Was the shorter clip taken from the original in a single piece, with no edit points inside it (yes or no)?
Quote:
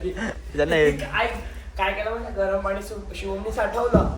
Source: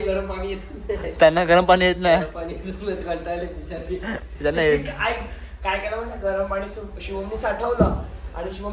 yes